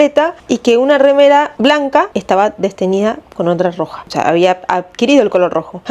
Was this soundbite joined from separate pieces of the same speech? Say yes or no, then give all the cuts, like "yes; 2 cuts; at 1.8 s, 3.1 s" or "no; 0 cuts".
no; 0 cuts